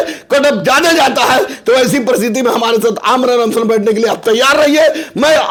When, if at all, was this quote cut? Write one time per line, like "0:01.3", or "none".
none